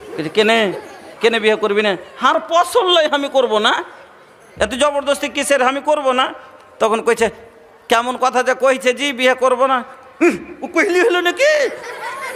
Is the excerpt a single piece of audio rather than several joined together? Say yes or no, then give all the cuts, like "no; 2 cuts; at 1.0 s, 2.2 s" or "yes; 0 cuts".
yes; 0 cuts